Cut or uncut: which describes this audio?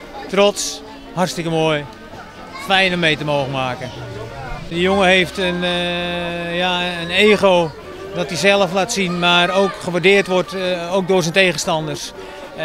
cut